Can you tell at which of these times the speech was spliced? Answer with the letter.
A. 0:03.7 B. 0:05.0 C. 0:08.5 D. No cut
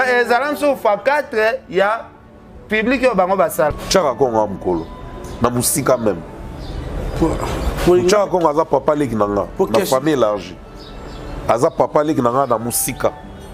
A